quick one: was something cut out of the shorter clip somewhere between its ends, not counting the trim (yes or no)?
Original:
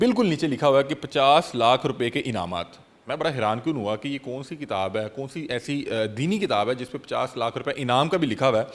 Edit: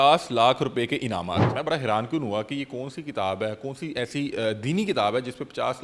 yes